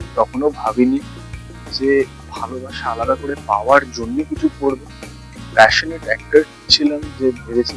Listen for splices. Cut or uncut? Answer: uncut